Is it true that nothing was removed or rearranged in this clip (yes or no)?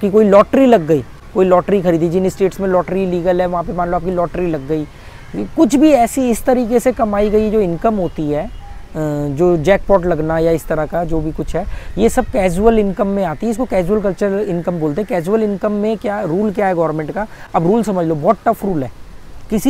yes